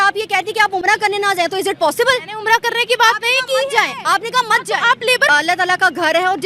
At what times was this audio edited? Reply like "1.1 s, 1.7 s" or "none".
5.3 s